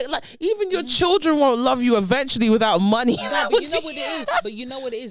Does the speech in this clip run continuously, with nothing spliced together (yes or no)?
yes